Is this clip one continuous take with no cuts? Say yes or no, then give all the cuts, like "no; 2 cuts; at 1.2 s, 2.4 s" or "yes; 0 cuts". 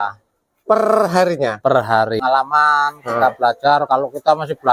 no; 1 cut; at 2.2 s